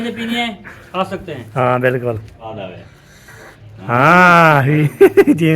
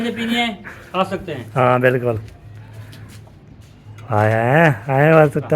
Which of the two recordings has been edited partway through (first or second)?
first